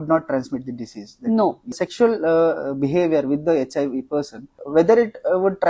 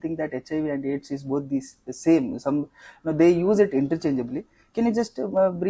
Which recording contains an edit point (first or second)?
first